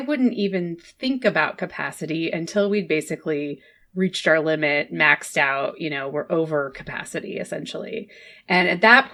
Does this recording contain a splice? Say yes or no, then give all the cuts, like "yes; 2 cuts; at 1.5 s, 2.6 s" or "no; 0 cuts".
no; 0 cuts